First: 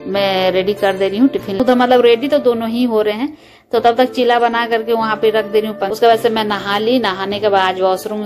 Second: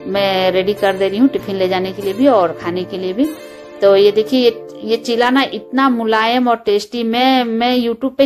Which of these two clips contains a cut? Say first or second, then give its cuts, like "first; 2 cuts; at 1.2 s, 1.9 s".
first; 2 cuts; at 1.6 s, 5.9 s